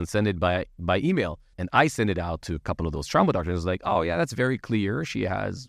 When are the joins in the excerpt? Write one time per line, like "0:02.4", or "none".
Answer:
0:01.5